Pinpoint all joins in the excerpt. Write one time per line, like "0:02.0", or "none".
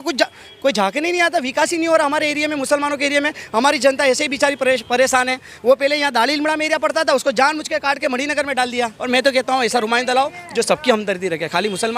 0:09.0